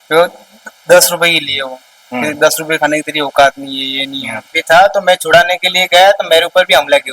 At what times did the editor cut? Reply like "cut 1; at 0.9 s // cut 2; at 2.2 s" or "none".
cut 1; at 4.6 s